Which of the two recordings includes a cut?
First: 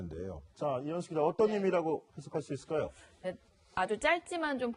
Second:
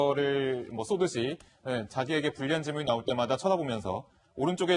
second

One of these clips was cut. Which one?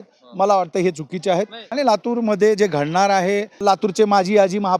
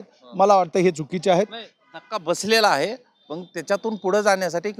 first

